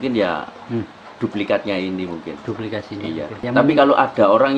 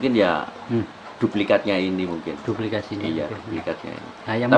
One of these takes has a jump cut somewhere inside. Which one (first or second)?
first